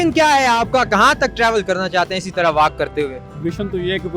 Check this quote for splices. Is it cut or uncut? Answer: cut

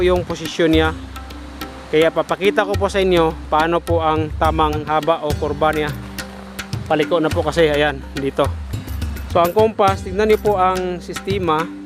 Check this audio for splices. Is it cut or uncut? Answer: cut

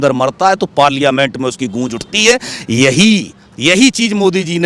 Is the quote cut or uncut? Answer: uncut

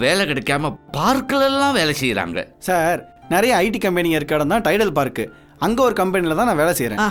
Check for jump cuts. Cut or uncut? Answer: uncut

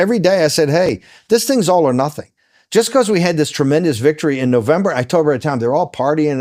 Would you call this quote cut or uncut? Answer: uncut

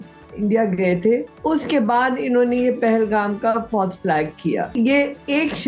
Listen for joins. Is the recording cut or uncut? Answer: cut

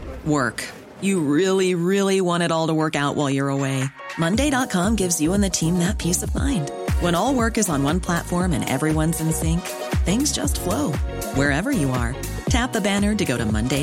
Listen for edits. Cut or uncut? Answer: uncut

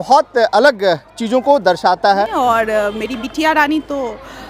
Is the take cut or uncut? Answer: cut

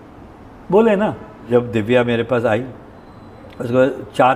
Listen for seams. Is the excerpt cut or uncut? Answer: cut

